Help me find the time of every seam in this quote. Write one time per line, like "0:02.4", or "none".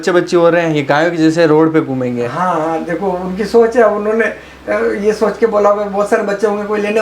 none